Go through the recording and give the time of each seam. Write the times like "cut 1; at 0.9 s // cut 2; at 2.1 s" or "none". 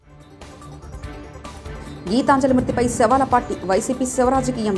none